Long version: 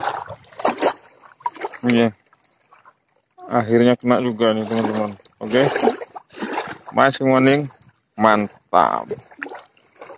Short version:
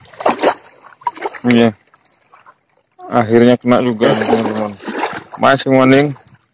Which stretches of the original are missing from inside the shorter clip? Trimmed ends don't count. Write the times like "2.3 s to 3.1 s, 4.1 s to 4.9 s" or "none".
5.2 s to 6.4 s

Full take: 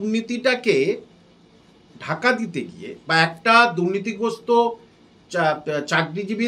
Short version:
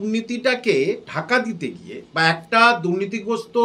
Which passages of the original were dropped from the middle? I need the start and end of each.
1.1 s to 2.0 s

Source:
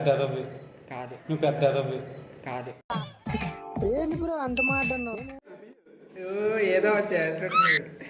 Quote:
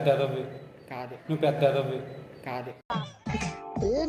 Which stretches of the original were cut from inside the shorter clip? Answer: none

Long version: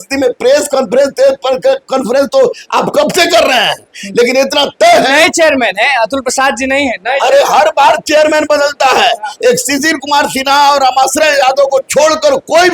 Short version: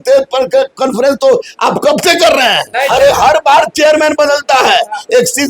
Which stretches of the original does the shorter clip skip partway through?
3.8 s to 7.0 s

